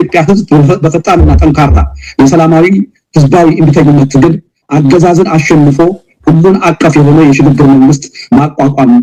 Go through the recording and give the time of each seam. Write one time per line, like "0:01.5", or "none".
none